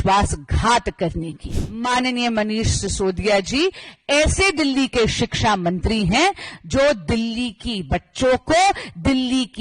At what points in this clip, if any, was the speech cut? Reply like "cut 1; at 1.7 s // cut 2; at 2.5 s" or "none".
cut 1; at 1.7 s